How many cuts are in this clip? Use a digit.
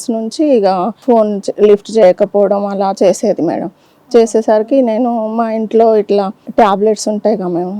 2